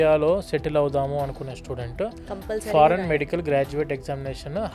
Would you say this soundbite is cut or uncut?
uncut